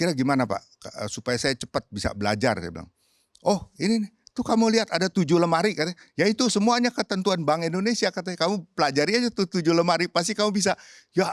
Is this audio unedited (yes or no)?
yes